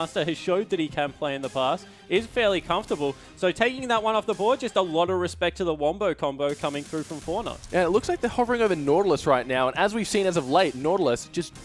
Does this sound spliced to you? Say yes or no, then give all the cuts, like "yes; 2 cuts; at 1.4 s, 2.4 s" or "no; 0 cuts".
yes; 1 cut; at 6.3 s